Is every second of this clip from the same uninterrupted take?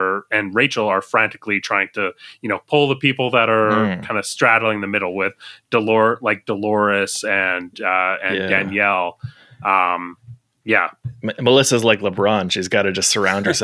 yes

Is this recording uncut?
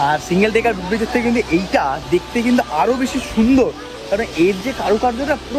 yes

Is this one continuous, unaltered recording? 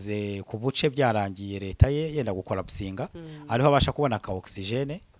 yes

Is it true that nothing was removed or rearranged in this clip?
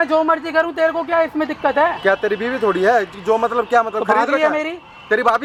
yes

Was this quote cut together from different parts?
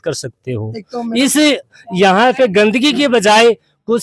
no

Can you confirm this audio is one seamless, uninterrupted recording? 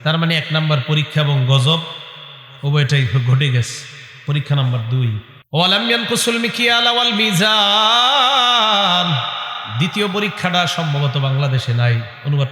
no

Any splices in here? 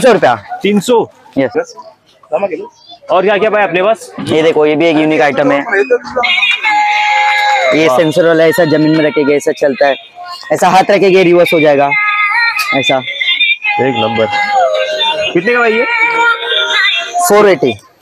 no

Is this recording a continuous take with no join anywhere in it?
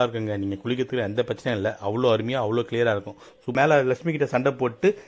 no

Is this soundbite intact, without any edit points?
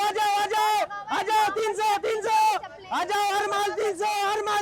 yes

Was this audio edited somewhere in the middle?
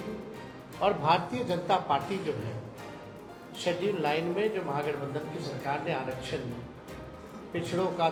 no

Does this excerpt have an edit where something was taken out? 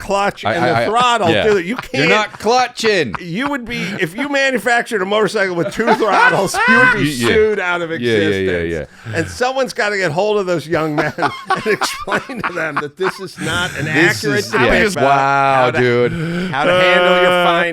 yes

